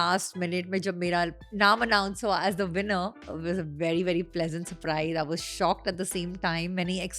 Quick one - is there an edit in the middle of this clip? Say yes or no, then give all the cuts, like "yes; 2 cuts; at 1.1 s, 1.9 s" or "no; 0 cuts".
yes; 2 cuts; at 1.4 s, 3.2 s